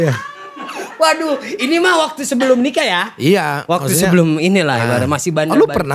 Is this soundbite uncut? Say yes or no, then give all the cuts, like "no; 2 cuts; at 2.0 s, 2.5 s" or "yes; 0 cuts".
yes; 0 cuts